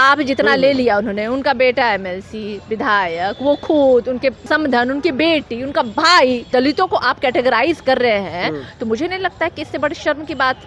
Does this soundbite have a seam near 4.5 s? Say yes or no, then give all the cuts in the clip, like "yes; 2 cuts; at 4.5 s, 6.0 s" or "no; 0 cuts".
yes; 2 cuts; at 4.5 s, 6.5 s